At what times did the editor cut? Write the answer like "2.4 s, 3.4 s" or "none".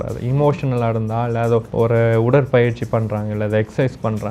1.7 s